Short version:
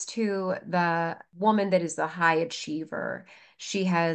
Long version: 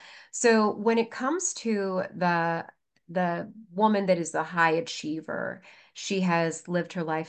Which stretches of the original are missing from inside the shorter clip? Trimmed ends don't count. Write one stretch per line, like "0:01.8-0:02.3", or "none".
0:02.7-0:03.6